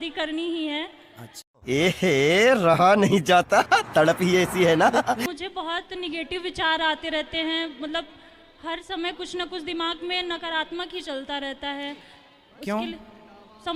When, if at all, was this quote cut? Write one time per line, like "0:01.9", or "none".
none